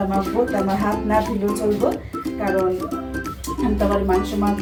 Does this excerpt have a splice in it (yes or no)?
no